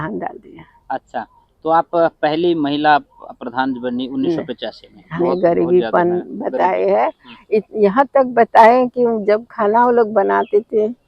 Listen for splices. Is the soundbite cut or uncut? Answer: cut